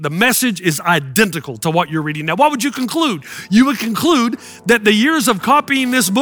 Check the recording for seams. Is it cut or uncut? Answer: uncut